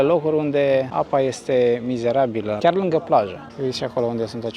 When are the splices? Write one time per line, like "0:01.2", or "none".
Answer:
0:00.9
0:02.6
0:03.4